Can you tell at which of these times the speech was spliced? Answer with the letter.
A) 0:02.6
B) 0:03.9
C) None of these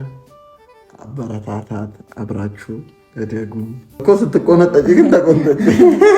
B